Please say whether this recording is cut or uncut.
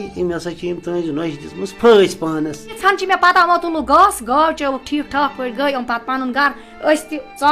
cut